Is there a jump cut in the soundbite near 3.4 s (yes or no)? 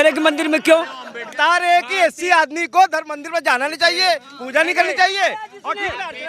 no